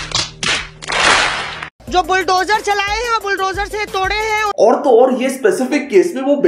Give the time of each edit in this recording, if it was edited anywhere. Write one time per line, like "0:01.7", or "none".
0:01.8